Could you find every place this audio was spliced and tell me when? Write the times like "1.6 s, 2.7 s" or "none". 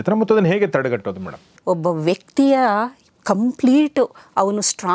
1.6 s